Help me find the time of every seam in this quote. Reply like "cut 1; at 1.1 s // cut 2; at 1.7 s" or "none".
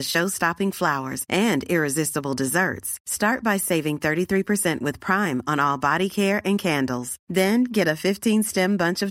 none